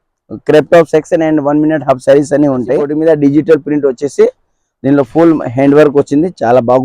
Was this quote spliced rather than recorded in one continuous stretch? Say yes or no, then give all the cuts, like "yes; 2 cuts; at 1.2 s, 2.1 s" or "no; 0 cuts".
yes; 1 cut; at 2.9 s